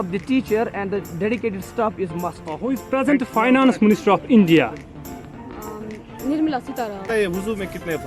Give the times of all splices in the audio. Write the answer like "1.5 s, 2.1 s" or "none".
2.5 s, 7.0 s